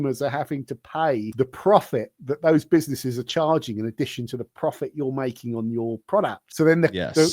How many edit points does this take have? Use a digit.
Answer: 2